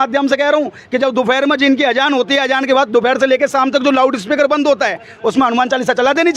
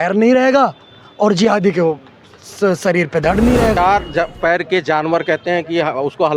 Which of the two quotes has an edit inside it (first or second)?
second